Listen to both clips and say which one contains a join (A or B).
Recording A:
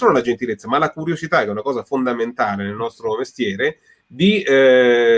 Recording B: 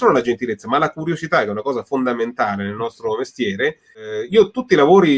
B